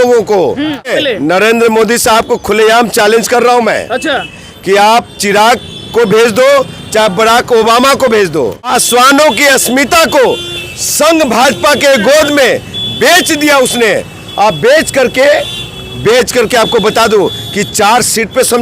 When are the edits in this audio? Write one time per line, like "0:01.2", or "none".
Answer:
0:00.9
0:08.7